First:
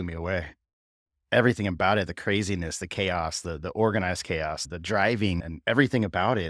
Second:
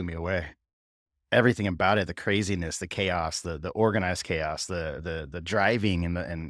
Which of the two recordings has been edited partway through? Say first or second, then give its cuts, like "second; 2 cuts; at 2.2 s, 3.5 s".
first; 2 cuts; at 4.6 s, 5.4 s